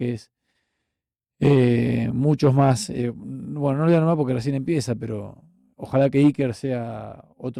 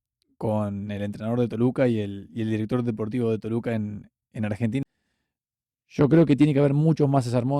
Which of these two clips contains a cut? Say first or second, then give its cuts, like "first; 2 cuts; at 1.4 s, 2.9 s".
second; 1 cut; at 4.8 s